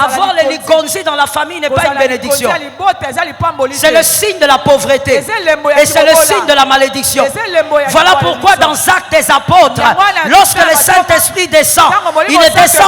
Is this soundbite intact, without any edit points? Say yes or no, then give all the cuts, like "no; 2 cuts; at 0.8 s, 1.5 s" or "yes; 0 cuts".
yes; 0 cuts